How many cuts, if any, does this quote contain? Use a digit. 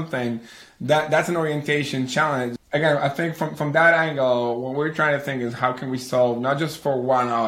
1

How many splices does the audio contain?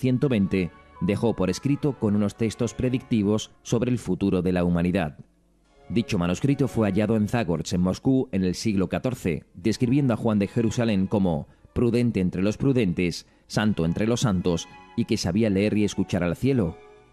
1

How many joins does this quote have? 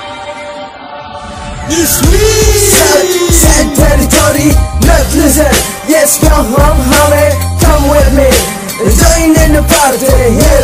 0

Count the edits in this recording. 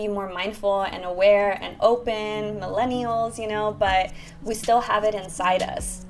0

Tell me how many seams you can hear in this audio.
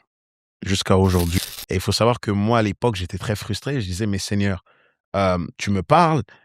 1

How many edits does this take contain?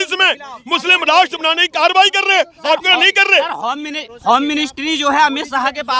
0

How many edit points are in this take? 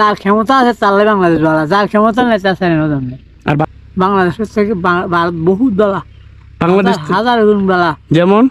1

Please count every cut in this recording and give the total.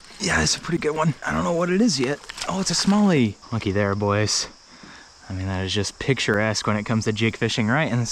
2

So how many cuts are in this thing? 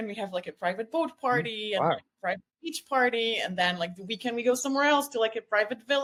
0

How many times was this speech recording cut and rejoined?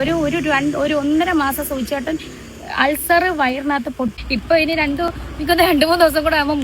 1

